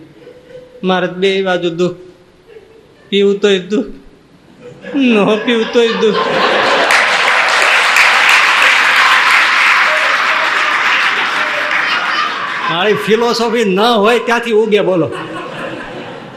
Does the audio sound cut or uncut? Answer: uncut